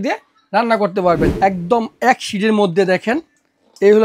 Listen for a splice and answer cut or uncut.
cut